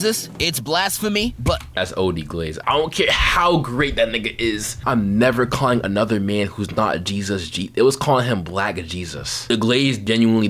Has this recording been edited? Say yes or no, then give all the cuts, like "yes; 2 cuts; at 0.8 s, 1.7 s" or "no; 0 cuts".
no; 0 cuts